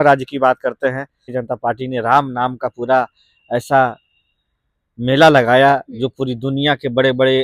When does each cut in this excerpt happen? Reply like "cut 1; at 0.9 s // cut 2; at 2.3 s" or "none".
cut 1; at 1.3 s